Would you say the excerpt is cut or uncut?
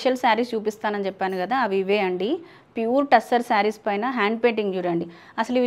uncut